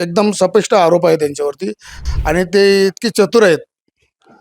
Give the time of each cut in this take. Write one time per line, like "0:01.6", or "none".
0:02.0